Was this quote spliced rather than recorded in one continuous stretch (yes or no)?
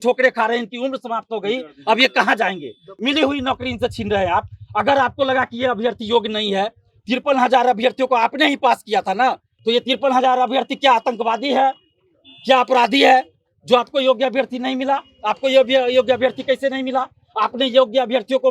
yes